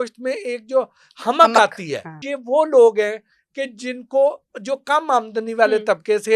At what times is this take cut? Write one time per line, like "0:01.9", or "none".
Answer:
0:02.3